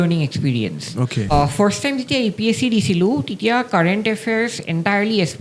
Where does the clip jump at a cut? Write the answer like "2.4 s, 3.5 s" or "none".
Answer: 1.3 s